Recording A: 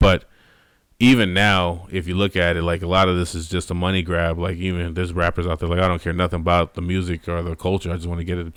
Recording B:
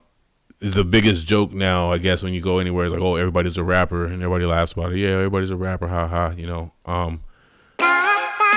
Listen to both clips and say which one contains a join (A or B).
B